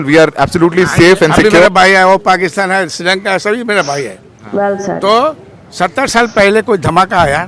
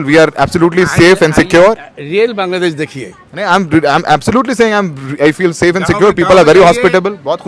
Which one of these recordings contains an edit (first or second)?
first